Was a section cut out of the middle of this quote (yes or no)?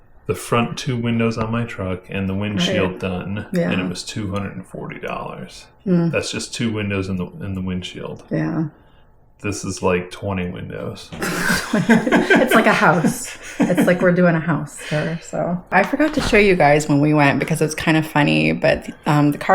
no